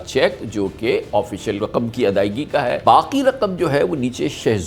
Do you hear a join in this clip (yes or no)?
yes